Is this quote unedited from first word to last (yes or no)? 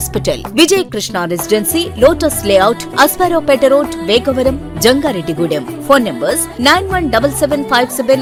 yes